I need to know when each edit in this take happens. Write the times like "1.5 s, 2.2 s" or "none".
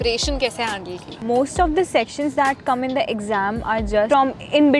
1.1 s